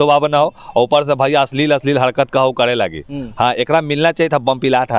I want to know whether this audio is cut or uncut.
uncut